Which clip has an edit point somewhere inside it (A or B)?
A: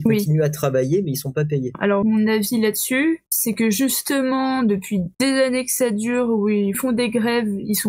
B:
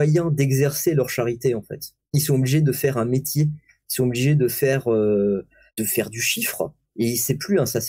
A